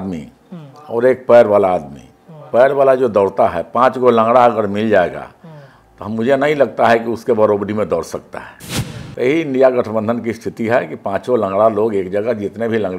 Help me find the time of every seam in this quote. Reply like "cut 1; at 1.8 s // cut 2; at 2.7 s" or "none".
none